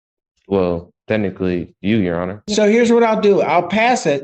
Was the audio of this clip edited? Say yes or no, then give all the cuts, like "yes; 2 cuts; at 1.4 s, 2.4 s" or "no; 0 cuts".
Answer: yes; 1 cut; at 2.4 s